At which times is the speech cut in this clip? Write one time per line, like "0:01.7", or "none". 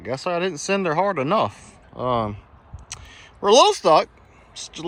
none